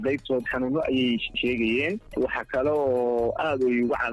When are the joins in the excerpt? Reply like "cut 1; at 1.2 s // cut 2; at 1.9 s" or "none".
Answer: cut 1; at 1.3 s // cut 2; at 2.1 s